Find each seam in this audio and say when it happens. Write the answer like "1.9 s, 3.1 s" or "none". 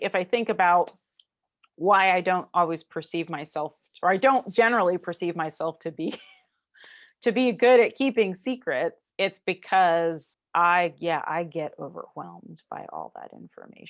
9.0 s, 10.3 s